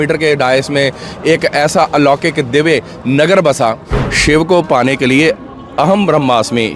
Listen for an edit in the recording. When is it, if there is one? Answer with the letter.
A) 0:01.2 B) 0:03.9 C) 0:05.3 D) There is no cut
B